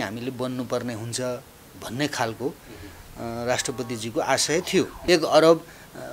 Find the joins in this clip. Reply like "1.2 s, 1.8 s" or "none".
5.0 s